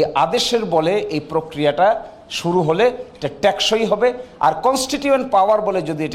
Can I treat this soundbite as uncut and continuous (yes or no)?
yes